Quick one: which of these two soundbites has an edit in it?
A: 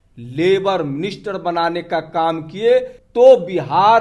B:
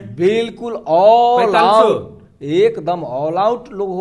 A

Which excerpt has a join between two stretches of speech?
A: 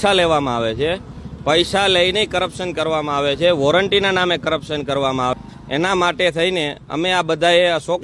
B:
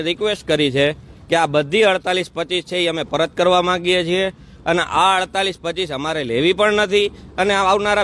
A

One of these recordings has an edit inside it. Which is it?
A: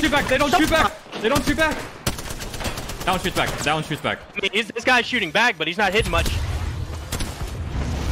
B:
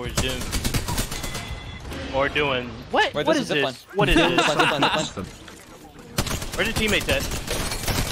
B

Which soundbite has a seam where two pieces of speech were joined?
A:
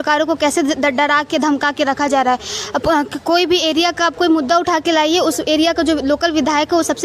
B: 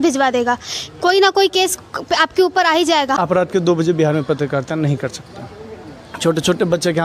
B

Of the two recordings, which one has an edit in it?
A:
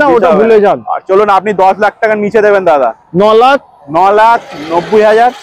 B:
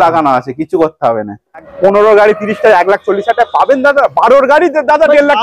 B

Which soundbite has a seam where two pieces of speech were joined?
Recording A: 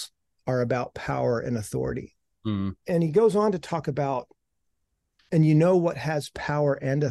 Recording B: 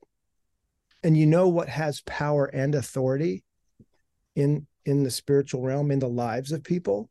A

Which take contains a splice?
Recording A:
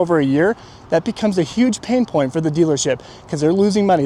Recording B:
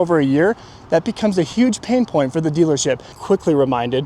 B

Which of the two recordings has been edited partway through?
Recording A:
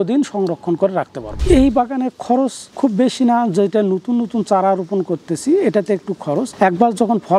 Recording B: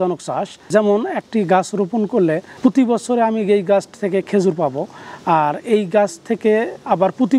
A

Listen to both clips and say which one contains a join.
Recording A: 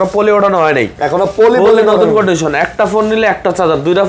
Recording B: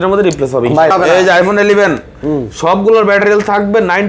B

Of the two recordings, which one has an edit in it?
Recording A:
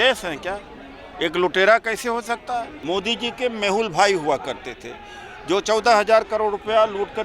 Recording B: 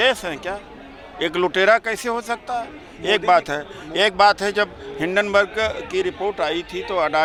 A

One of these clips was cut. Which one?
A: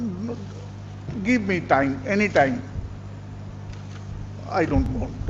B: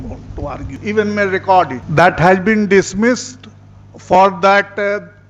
B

